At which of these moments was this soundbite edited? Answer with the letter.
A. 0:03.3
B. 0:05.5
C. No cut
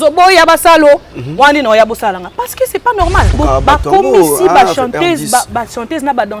A